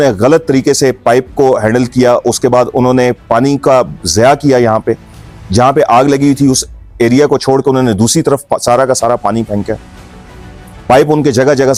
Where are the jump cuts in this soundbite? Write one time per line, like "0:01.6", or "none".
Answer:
none